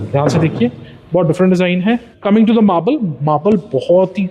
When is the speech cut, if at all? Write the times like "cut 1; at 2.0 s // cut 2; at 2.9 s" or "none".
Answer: cut 1; at 2.1 s

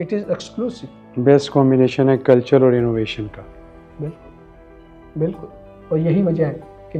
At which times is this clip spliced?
cut 1; at 0.9 s // cut 2; at 5.7 s

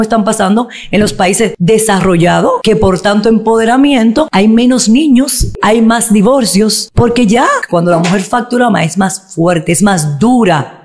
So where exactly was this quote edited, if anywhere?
cut 1; at 1.6 s // cut 2; at 2.6 s // cut 3; at 4.3 s // cut 4; at 5.6 s // cut 5; at 6.8 s // cut 6; at 7.6 s

